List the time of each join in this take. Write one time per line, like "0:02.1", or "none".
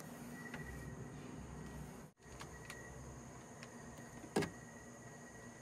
0:02.1

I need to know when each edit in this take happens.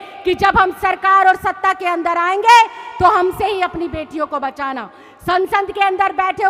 none

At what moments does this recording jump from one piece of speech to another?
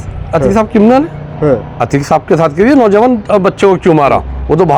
none

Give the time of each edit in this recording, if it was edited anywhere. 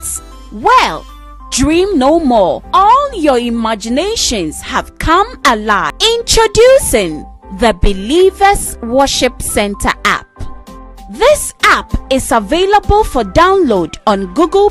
0:05.9

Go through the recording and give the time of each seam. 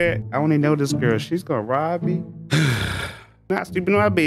none

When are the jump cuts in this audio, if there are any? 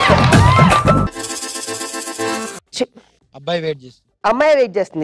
0:01.1

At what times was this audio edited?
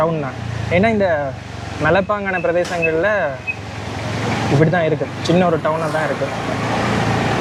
none

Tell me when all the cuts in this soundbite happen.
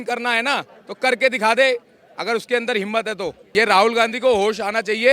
0:03.4

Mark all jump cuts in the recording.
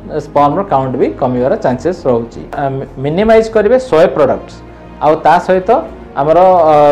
0:02.6

